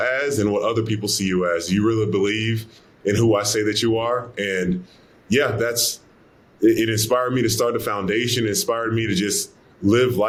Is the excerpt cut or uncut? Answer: uncut